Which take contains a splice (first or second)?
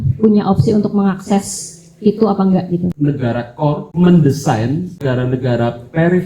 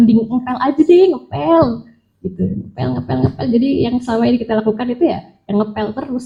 first